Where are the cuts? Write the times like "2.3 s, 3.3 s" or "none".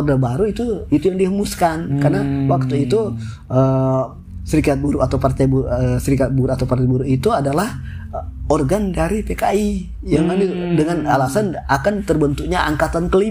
none